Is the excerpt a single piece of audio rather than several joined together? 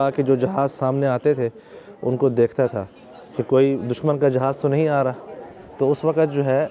yes; 0 cuts

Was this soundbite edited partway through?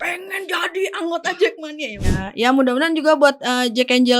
yes; 1 cut; at 2.1 s

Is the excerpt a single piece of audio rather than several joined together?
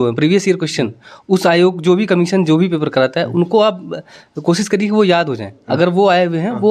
yes; 0 cuts

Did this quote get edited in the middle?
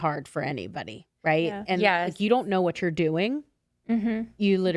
no; 0 cuts

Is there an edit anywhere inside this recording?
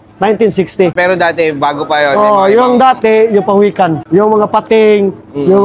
yes; 2 cuts; at 0.9 s, 4.0 s

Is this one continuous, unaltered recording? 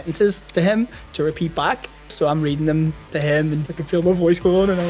no; 2 cuts; at 2.1 s, 3.6 s

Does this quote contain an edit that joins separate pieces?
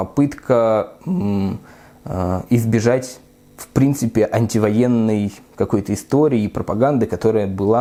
no; 0 cuts

